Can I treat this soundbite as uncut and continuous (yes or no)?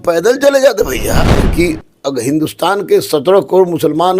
no